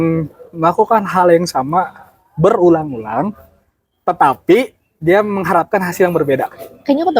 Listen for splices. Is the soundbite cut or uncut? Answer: uncut